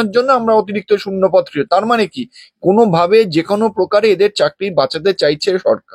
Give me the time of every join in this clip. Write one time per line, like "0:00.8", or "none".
none